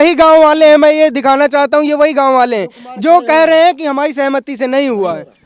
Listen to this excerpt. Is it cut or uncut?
uncut